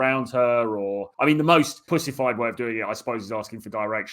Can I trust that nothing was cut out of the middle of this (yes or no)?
no